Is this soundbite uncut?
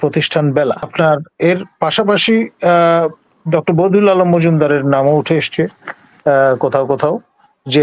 no; 1 cut; at 0.9 s

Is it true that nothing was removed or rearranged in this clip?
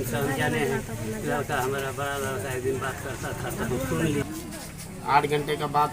no; 1 cut; at 4.2 s

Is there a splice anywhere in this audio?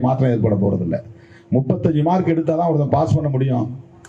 no; 0 cuts

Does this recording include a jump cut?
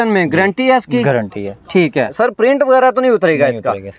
yes; 1 cut; at 2.1 s

